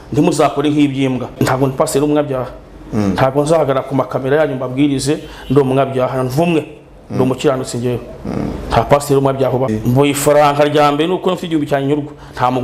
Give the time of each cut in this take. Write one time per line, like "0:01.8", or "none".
0:01.3
0:09.7